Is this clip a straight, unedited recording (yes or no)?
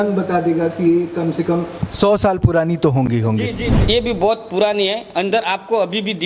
no